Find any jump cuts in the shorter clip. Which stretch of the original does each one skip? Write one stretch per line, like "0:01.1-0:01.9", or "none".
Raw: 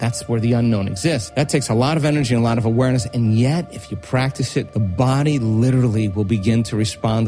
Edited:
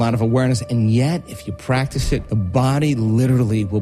none